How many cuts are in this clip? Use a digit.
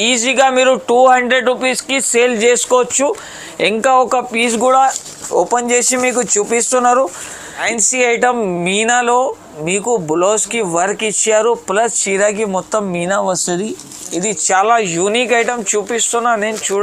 1